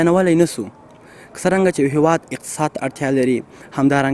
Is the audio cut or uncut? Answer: uncut